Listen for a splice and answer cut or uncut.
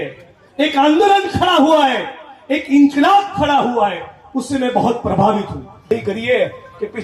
cut